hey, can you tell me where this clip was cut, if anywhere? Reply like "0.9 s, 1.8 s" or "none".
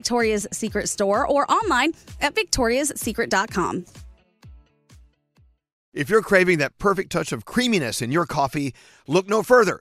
5.9 s